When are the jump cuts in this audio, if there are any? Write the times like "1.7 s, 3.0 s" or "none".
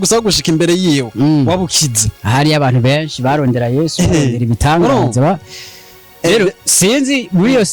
none

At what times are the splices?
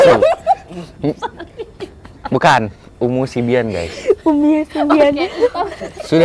none

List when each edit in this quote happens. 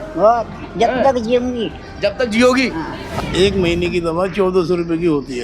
3.0 s

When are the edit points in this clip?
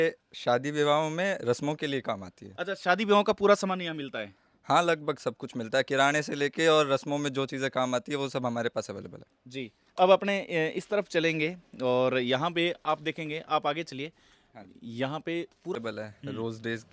15.7 s

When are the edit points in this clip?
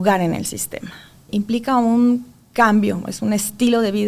1.3 s

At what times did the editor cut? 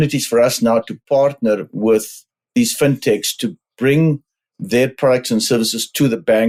none

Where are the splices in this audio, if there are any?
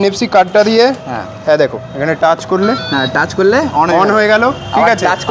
none

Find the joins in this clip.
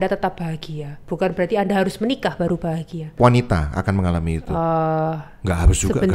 3.1 s

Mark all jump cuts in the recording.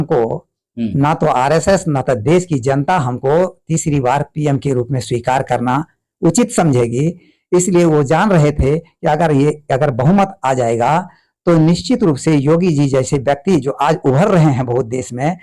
none

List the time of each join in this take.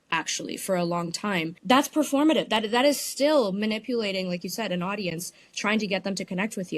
1.5 s

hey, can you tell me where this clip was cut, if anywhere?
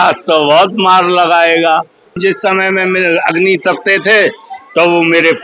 2.2 s

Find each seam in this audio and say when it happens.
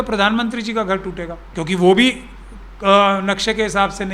1.4 s

